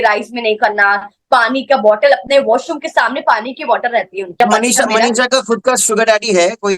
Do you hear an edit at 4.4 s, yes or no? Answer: yes